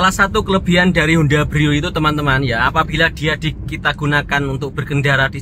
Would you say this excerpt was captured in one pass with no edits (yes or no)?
yes